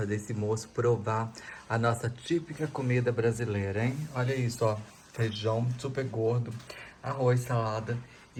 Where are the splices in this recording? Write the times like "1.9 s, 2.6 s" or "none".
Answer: none